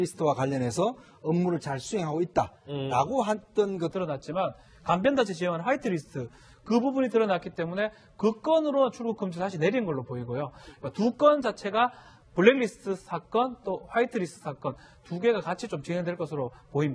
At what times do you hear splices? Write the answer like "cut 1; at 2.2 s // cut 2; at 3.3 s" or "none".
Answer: none